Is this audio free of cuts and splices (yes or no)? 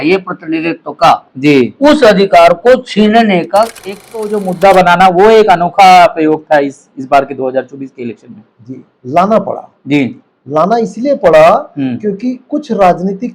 no